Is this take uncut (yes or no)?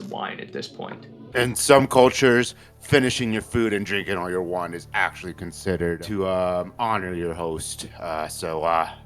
no